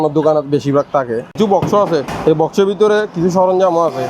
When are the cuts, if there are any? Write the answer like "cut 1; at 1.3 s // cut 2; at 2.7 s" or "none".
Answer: cut 1; at 1.3 s // cut 2; at 2.1 s